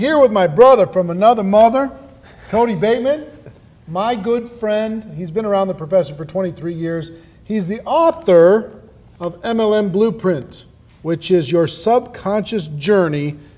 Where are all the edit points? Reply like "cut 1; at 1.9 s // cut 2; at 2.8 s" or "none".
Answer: none